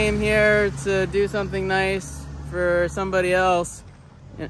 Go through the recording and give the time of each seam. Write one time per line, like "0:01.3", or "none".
none